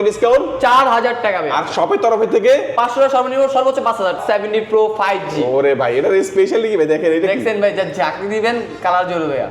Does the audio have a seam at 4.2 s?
yes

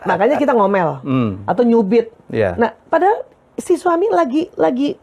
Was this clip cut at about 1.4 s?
no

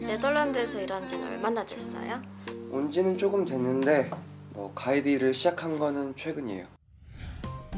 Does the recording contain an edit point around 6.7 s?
yes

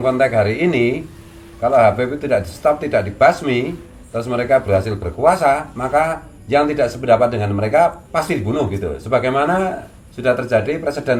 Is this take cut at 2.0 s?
no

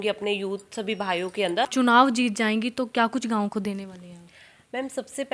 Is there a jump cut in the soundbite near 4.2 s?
no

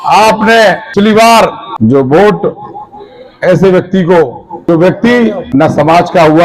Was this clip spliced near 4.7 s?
yes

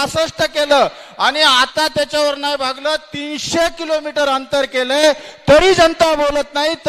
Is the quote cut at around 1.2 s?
no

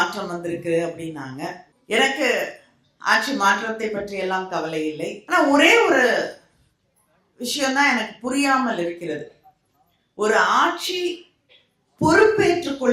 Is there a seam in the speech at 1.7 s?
yes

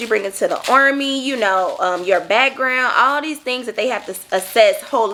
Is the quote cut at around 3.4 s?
no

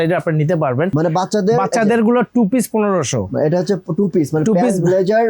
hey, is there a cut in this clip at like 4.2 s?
no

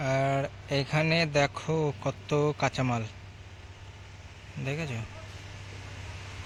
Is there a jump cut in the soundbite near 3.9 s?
no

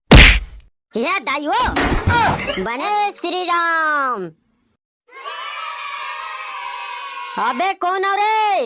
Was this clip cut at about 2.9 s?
yes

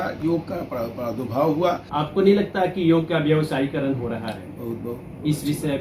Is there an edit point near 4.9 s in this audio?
no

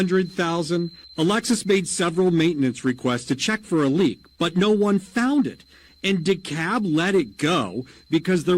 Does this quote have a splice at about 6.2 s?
yes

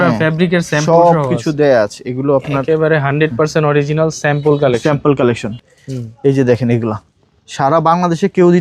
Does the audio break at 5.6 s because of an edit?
yes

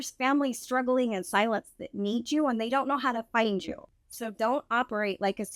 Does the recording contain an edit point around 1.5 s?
no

